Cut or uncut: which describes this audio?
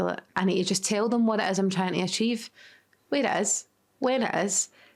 uncut